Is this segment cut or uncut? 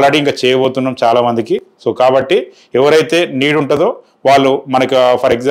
uncut